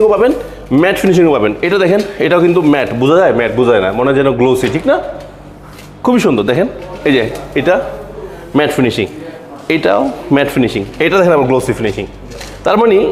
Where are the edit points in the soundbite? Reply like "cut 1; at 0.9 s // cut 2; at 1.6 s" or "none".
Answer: none